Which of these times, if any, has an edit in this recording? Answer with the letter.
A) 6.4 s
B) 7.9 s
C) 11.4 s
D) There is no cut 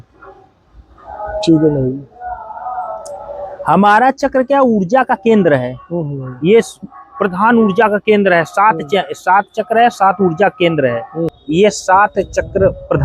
C